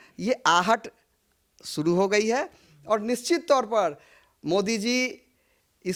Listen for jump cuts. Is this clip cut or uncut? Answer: uncut